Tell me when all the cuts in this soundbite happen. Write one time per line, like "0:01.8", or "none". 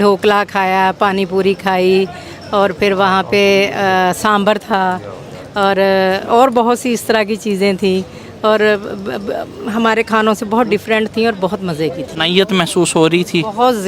0:12.1